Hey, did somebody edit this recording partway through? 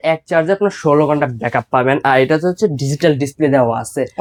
no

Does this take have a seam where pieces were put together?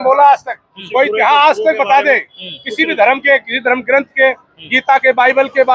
no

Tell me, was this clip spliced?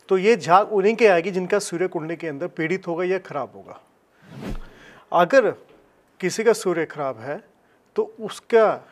yes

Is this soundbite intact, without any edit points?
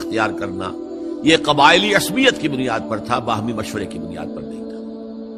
no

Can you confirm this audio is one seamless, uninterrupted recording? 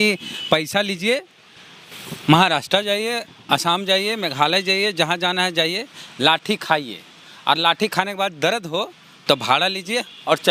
yes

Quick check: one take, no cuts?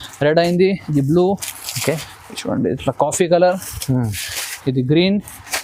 yes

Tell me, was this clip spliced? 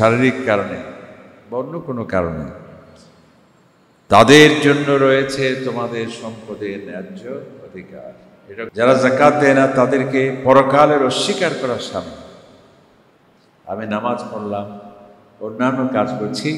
yes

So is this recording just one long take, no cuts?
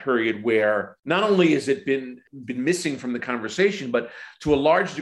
no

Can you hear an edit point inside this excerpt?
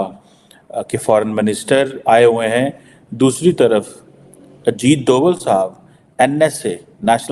no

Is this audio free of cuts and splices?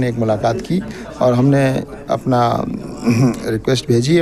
yes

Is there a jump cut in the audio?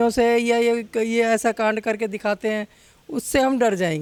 no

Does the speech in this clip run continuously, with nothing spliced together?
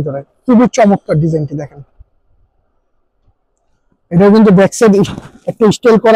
yes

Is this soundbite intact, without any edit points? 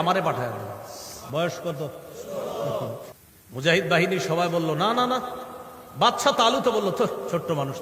no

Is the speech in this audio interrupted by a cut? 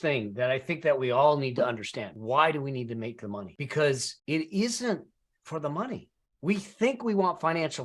yes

